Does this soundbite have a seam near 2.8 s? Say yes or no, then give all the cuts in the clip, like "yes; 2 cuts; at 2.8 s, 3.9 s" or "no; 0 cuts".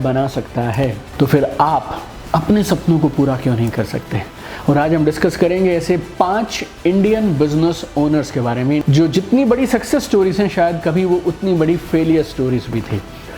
no; 2 cuts; at 1.0 s, 8.8 s